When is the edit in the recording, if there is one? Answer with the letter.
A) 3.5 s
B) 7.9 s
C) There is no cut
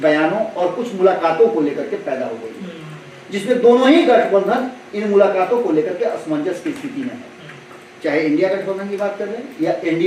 C